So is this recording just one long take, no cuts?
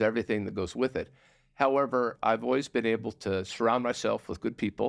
no; 1 cut; at 2.1 s

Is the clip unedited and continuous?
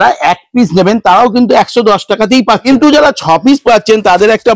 no; 1 cut; at 2.7 s

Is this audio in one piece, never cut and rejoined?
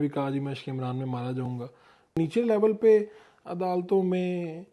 no; 1 cut; at 2.2 s

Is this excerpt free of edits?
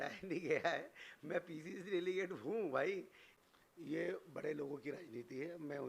no; 1 cut; at 3.2 s

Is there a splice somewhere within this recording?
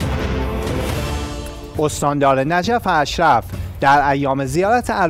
yes; 1 cut; at 1.3 s

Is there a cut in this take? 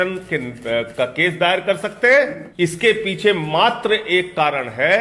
yes; 1 cut; at 2.4 s

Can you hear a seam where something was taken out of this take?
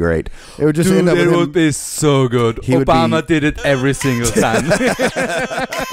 no; 0 cuts

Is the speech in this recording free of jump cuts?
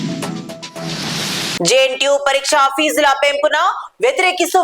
no; 1 cut; at 1.6 s

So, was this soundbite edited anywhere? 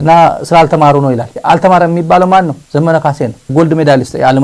no; 0 cuts

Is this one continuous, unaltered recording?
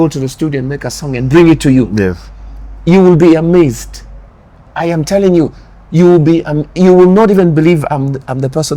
yes; 0 cuts

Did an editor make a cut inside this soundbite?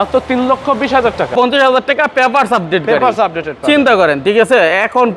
yes; 1 cut; at 1.3 s

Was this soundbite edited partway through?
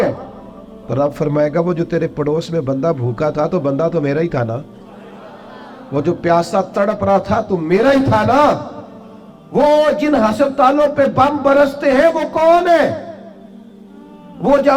no; 0 cuts

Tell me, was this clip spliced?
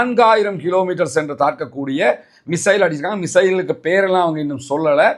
no; 0 cuts

